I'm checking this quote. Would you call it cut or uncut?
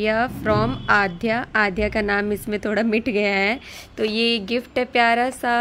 uncut